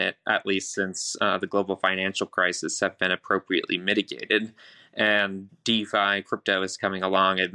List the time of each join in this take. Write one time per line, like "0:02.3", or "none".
none